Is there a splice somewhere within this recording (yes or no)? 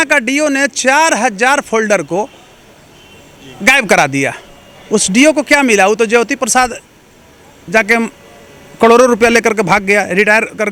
no